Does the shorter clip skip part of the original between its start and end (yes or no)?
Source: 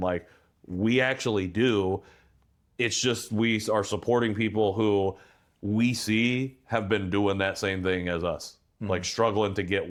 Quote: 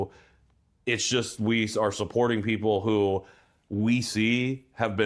no